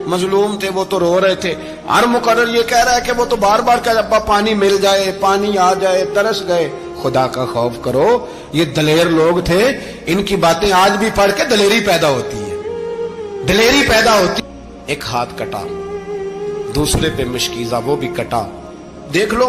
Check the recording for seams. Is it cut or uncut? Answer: cut